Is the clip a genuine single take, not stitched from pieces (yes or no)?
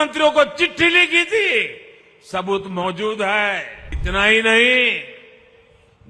no